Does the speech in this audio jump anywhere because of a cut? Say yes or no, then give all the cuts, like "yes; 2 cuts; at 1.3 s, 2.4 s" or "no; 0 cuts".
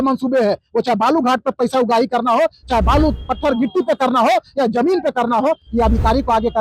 no; 0 cuts